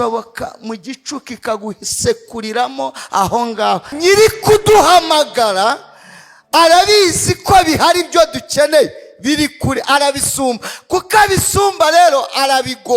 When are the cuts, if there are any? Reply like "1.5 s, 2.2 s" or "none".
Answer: 3.9 s